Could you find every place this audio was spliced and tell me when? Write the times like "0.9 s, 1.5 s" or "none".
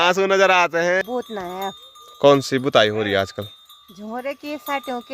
1.0 s